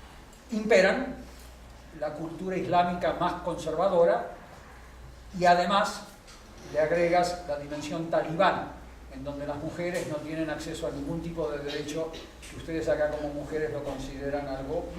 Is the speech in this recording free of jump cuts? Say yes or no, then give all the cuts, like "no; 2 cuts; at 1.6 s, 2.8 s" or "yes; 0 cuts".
no; 1 cut; at 8.7 s